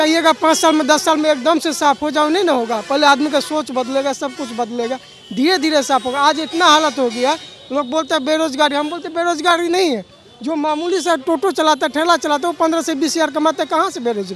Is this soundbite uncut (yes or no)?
yes